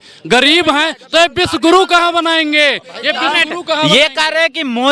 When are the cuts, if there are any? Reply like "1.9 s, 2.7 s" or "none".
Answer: none